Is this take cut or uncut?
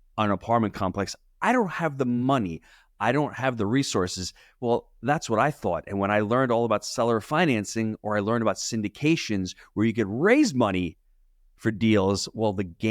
uncut